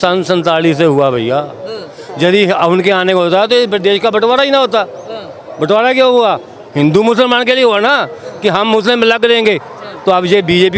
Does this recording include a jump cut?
no; 0 cuts

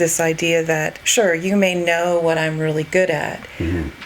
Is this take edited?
yes; 1 cut; at 1.0 s

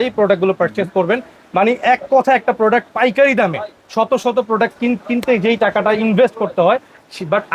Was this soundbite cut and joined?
no; 0 cuts

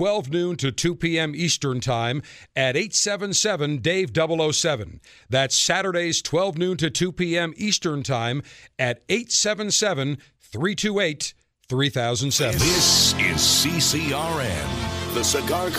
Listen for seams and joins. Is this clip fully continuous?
no; 1 cut; at 12.5 s

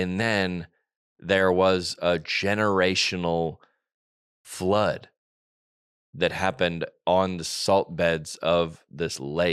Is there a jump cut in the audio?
no; 0 cuts

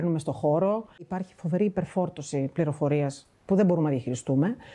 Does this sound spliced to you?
yes; 1 cut; at 1.1 s

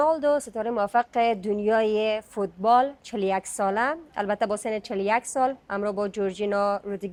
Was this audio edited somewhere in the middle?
no; 0 cuts

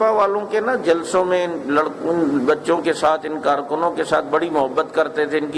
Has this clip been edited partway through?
no; 0 cuts

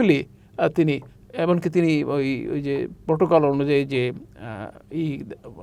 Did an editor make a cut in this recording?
no; 0 cuts

